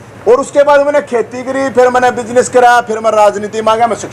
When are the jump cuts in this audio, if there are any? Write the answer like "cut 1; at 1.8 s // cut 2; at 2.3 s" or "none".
none

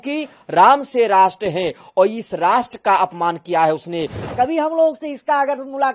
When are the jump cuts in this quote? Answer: cut 1; at 4.2 s

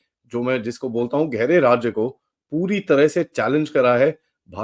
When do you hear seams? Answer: none

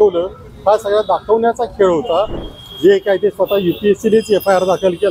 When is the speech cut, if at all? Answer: cut 1; at 2.4 s

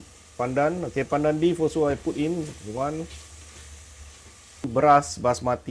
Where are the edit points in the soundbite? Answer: cut 1; at 4.7 s

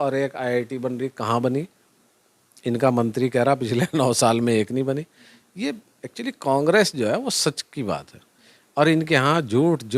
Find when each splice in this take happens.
none

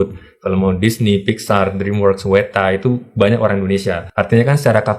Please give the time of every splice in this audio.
cut 1; at 4.0 s

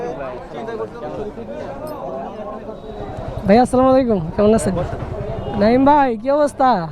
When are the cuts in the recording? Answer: cut 1; at 3.2 s // cut 2; at 5.4 s

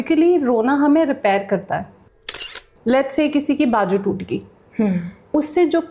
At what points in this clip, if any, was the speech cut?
cut 1; at 2.3 s

